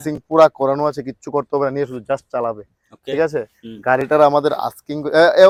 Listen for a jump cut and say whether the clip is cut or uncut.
uncut